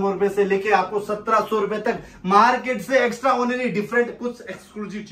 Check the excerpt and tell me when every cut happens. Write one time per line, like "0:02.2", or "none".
none

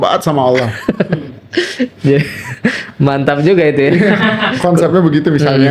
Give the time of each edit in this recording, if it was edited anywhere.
none

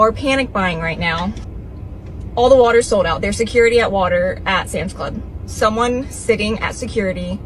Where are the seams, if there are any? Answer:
0:01.5

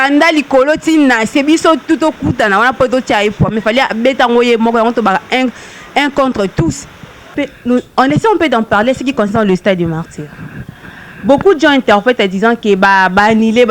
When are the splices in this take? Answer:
0:07.3

